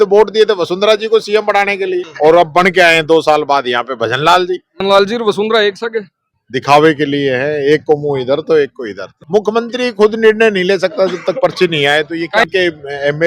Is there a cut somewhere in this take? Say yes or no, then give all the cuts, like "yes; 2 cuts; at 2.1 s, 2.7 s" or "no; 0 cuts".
yes; 4 cuts; at 2.1 s, 4.7 s, 9.1 s, 12.4 s